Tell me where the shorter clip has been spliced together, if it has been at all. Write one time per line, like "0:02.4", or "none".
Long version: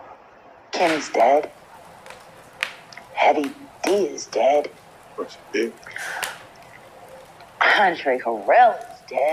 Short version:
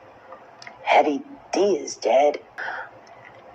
0:02.6

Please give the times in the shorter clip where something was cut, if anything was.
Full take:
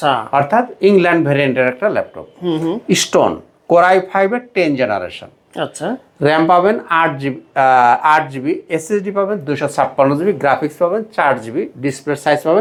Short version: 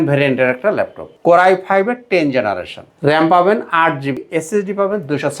0:01.0
0:02.9
0:04.3

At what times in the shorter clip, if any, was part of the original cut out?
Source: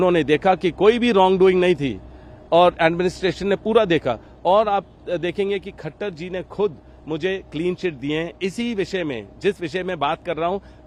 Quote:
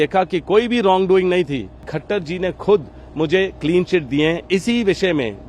0:01.9

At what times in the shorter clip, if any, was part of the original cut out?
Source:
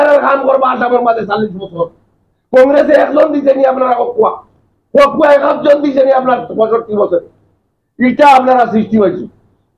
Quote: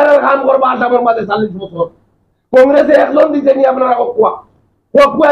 none

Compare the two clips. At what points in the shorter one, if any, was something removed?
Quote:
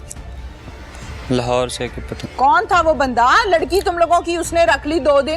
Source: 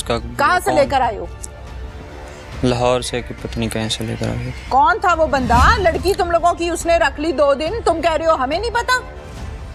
0:02.1

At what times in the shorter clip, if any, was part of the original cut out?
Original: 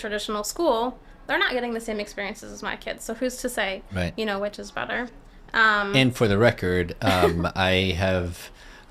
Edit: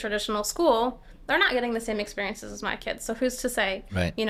none

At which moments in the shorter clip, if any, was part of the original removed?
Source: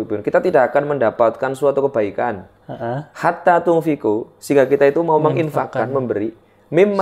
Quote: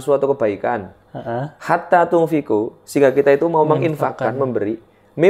none

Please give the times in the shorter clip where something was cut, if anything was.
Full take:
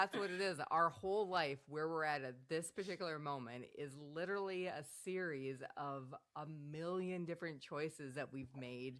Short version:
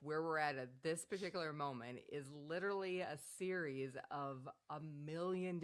none

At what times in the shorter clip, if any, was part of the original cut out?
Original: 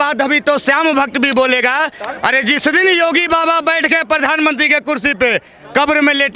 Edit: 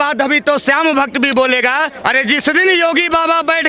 0:01.9

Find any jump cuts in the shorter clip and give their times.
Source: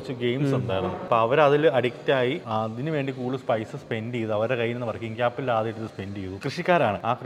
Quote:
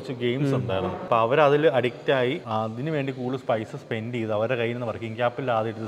none

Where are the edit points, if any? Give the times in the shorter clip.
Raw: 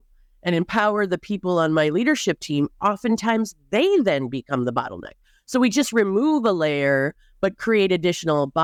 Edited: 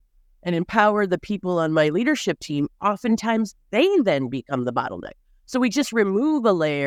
none

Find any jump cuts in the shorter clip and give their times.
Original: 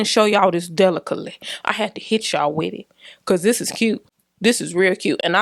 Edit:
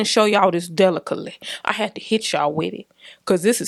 none

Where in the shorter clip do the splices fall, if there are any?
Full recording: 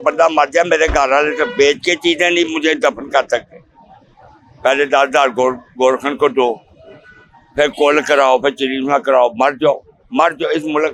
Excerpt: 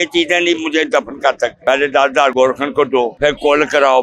0:01.6
0:02.3
0:03.1

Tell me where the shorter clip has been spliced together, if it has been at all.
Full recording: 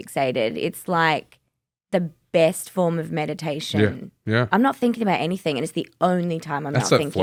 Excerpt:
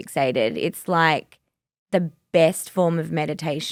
none

